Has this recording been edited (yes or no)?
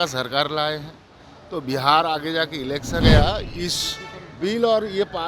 yes